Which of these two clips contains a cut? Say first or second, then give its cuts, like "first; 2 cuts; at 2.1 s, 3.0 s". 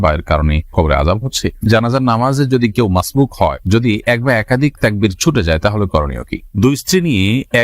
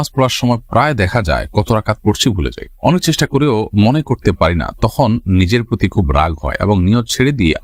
first; 2 cuts; at 1.7 s, 6.4 s